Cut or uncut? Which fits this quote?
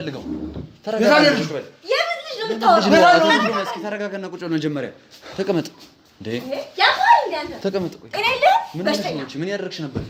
uncut